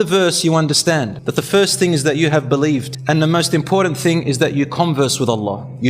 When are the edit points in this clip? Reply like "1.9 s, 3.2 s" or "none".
1.2 s, 2.9 s